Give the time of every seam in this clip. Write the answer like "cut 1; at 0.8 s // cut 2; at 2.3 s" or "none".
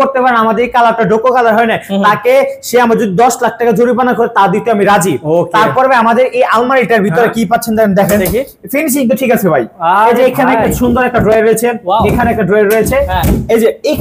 none